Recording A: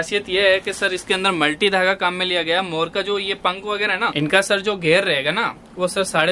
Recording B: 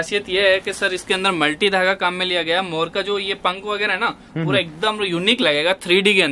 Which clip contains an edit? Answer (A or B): A